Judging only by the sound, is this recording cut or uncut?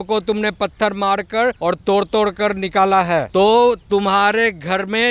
cut